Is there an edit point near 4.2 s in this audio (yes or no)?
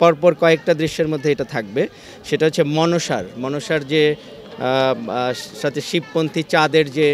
no